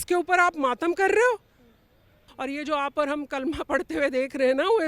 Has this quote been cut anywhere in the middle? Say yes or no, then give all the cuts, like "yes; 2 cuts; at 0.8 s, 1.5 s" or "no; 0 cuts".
yes; 1 cut; at 2.3 s